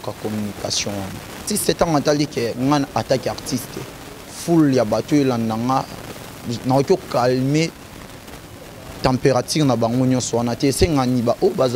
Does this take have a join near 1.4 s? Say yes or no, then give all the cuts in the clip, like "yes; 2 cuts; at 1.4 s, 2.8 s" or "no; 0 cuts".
yes; 1 cut; at 1.4 s